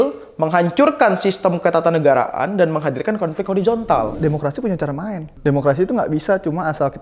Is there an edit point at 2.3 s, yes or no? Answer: no